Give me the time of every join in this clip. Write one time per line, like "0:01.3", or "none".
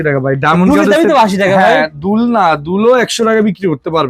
none